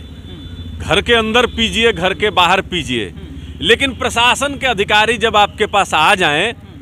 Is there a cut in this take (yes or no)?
no